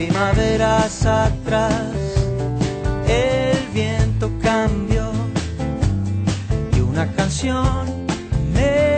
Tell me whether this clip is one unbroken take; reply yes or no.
yes